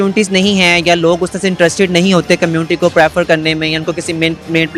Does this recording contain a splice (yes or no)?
no